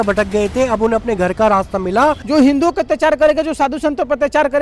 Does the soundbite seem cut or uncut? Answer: cut